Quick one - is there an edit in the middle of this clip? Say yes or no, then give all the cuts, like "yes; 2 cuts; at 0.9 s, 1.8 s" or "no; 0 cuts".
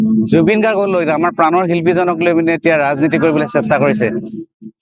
no; 0 cuts